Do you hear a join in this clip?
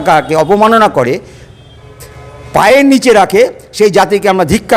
no; 0 cuts

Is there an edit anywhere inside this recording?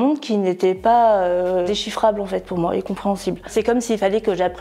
yes; 2 cuts; at 1.7 s, 3.5 s

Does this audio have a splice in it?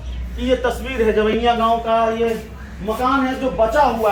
no; 0 cuts

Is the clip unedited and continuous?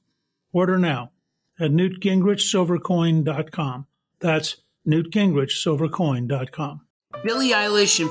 no; 1 cut; at 6.8 s

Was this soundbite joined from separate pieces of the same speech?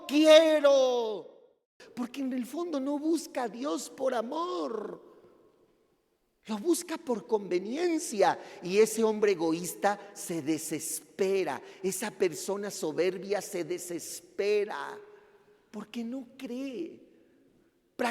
yes; 1 cut; at 1.8 s

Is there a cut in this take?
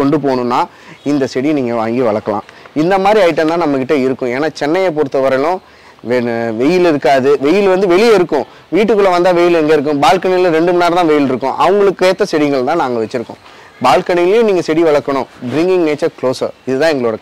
no; 0 cuts

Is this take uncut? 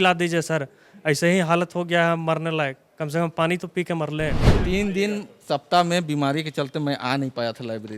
no; 1 cut; at 4.5 s

